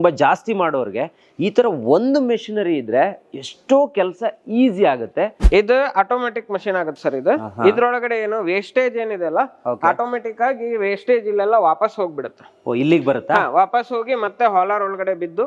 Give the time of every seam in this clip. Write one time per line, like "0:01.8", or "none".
0:05.4

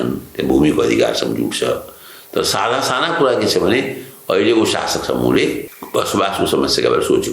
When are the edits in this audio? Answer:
0:05.7

